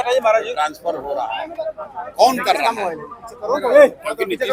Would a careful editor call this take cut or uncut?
uncut